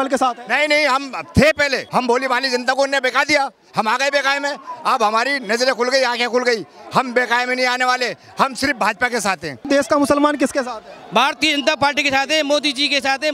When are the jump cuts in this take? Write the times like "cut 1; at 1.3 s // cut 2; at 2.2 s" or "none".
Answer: cut 1; at 1.8 s // cut 2; at 9.7 s